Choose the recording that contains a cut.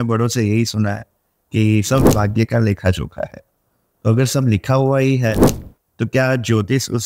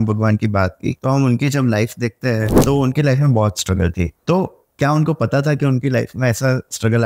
second; 3 cuts; at 1.0 s, 2.5 s, 4.2 s

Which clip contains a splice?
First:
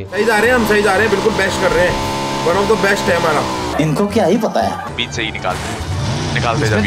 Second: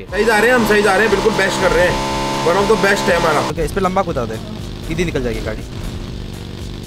second; 2 cuts; at 3.5 s, 5.7 s

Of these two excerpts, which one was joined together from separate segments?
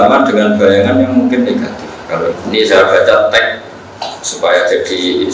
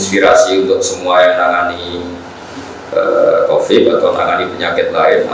first; 1 cut; at 2.4 s

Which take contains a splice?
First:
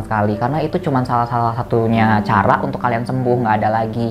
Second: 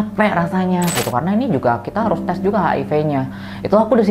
second; 1 cut; at 0.9 s

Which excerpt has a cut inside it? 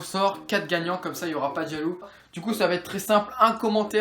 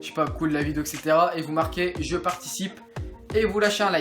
first; 1 cut; at 2.2 s

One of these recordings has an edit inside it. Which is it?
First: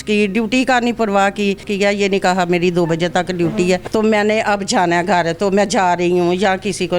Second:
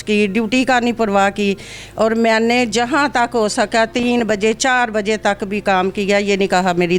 first; 2 cuts; at 1.7 s, 3.9 s

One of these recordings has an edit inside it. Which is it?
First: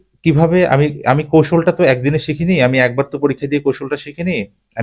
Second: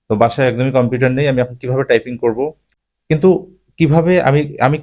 second; 1 cut; at 2.6 s

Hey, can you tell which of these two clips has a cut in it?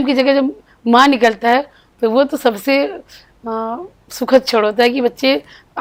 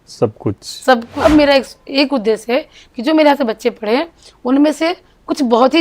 second; 1 cut; at 1.1 s

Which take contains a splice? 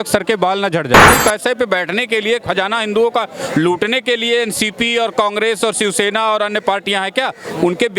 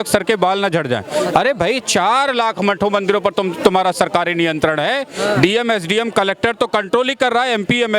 first; 1 cut; at 1.1 s

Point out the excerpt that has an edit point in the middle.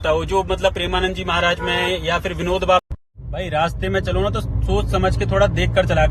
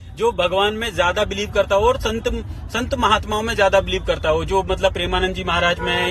first; 1 cut; at 2.8 s

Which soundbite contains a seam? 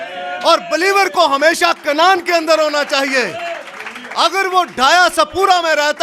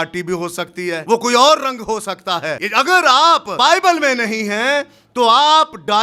second; 3 cuts; at 1.0 s, 2.6 s, 3.5 s

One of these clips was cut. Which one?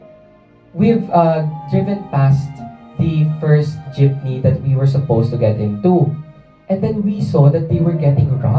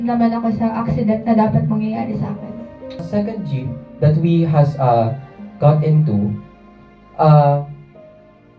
second; 1 cut; at 3.0 s

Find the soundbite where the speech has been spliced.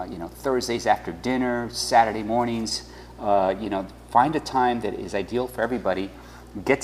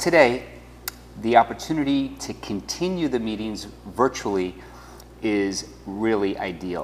first; 1 cut; at 5.1 s

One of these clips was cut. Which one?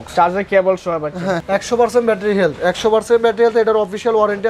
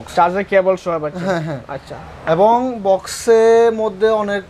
first; 1 cut; at 1.5 s

